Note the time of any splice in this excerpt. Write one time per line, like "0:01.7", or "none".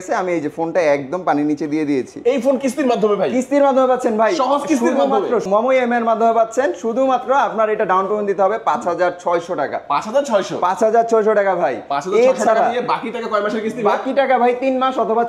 none